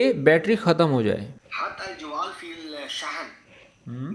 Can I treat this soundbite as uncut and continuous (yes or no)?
no